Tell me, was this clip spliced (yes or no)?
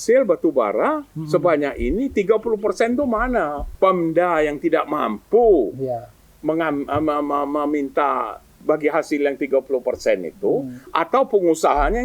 yes